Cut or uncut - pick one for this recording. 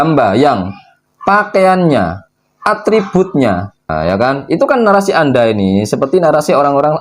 cut